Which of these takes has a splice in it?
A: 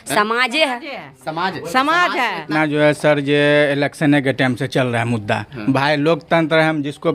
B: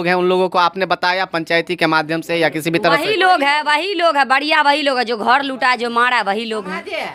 A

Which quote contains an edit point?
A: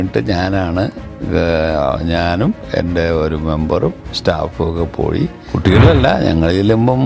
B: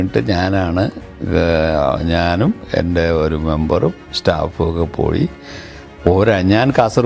A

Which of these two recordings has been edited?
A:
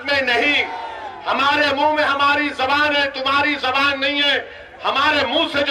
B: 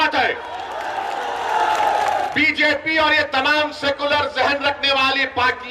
B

